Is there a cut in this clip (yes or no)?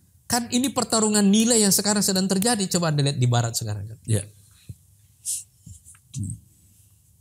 no